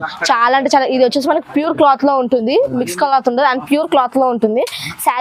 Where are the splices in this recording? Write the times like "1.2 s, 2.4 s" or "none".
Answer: none